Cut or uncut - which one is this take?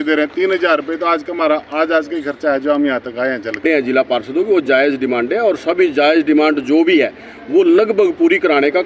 cut